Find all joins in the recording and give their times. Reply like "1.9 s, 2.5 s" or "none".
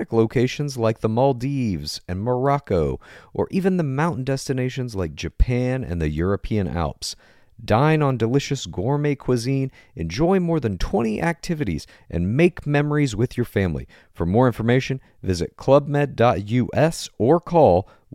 none